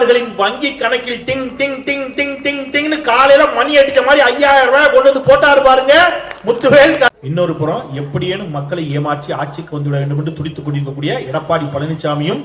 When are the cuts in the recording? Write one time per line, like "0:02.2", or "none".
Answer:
0:07.1